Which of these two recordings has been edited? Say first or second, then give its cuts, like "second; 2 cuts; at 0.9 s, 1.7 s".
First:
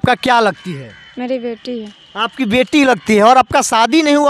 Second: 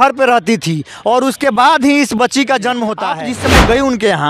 second; 1 cut; at 3.2 s